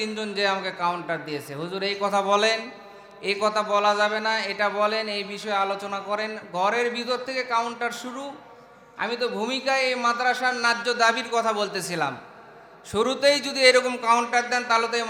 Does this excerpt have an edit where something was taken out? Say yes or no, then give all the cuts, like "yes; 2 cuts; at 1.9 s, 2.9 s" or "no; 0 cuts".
no; 0 cuts